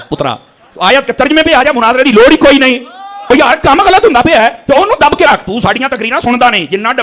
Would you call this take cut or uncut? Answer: cut